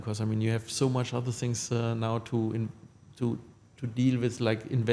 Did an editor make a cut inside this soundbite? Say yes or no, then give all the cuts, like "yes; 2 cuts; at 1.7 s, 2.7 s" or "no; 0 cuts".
no; 0 cuts